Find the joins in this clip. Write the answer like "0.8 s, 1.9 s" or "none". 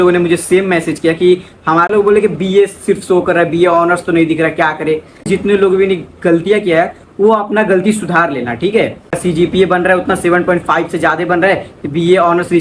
1.9 s, 5.3 s, 9.1 s